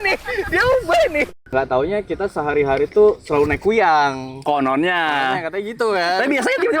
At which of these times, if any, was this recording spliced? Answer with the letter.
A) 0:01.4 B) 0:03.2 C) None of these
A